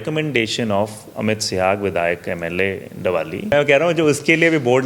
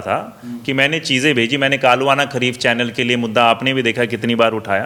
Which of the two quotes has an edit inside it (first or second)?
first